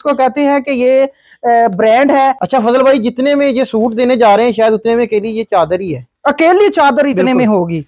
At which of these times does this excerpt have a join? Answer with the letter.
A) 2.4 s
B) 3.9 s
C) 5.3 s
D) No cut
A